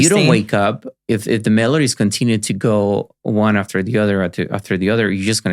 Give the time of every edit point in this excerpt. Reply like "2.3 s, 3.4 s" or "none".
none